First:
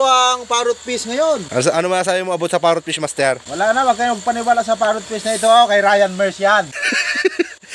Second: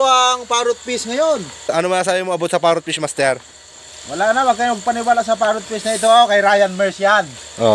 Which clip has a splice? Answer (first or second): first